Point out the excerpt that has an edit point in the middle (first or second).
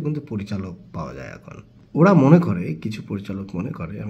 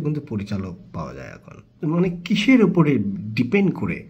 second